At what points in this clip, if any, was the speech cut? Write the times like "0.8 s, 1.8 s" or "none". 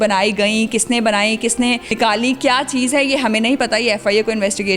2.0 s